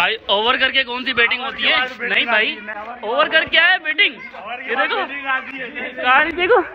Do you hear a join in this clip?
no; 0 cuts

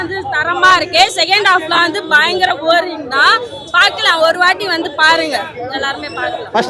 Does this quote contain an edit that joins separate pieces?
no; 0 cuts

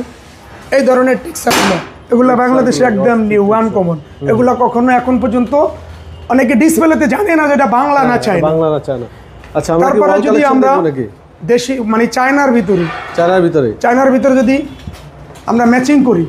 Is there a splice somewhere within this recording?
no; 0 cuts

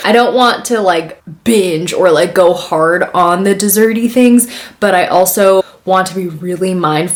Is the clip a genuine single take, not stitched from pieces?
yes; 0 cuts

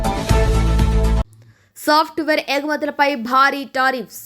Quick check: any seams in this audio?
yes; 1 cut; at 1.4 s

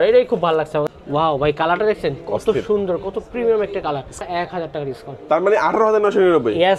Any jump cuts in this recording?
yes; 2 cuts; at 0.8 s, 4.2 s

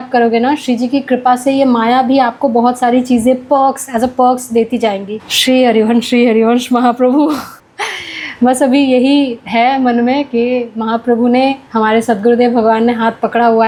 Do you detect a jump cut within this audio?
no; 0 cuts

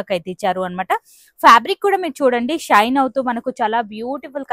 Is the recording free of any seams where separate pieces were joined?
yes; 0 cuts

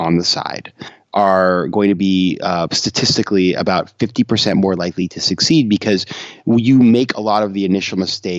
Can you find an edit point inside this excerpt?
yes; 1 cut; at 0.9 s

